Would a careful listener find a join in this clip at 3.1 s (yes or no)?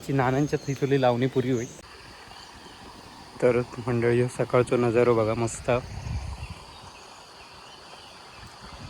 no